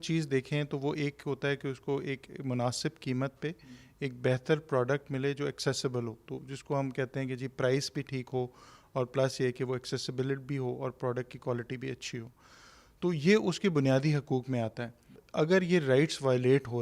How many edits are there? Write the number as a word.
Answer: one